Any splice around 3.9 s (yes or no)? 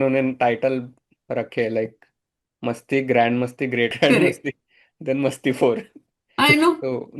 yes